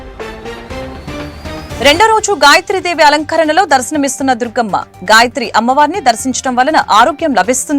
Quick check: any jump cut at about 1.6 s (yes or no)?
yes